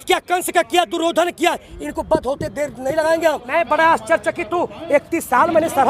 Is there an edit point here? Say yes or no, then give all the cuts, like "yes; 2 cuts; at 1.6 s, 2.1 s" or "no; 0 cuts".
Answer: yes; 1 cut; at 3.4 s